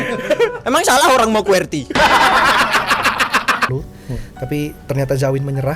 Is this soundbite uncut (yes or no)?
no